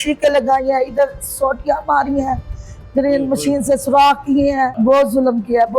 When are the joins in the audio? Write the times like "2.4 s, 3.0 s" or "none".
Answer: 4.7 s